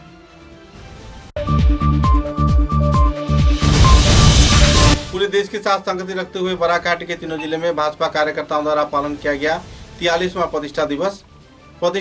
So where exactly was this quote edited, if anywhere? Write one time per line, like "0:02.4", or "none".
0:01.3
0:05.0